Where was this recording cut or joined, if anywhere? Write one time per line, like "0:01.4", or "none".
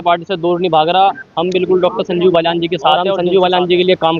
0:03.1